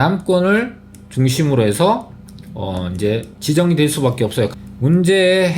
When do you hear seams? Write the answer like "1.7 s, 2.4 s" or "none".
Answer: 4.5 s